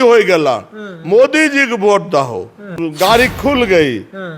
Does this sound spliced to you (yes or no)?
yes